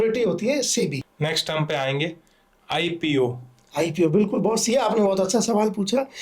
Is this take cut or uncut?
cut